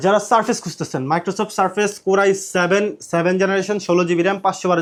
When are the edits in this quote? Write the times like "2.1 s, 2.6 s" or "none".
none

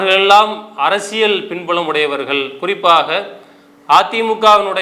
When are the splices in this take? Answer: none

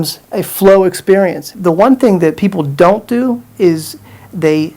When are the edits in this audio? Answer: 1.5 s

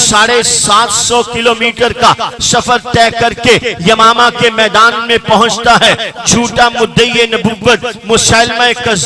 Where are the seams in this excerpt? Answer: none

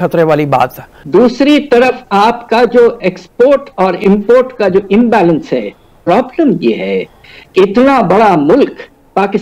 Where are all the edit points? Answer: 0.9 s, 5.9 s

